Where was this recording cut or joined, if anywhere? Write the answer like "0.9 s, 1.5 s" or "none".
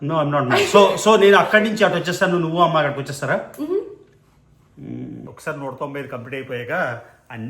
5.2 s